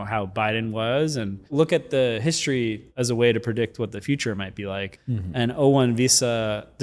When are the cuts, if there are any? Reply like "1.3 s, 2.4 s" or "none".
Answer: 1.5 s, 2.9 s, 5.0 s